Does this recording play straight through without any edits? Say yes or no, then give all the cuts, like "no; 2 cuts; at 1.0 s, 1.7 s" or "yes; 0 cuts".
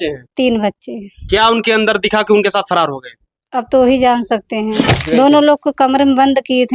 no; 1 cut; at 4.9 s